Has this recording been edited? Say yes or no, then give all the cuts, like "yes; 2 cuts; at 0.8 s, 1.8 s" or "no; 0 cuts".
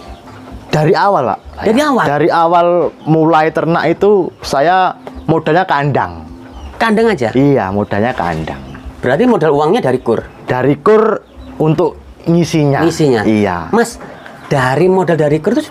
no; 0 cuts